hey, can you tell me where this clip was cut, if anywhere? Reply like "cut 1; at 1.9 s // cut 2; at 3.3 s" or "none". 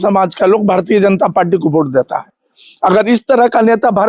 none